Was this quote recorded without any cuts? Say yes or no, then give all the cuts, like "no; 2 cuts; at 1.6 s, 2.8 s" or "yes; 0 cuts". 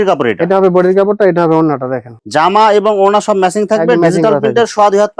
yes; 0 cuts